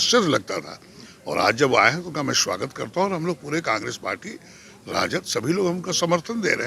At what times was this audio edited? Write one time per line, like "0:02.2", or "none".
none